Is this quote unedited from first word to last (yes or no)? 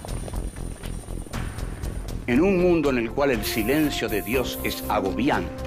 yes